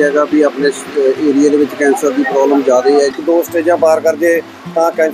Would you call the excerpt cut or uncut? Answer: cut